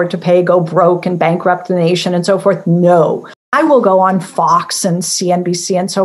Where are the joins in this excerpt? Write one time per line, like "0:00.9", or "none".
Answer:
0:03.5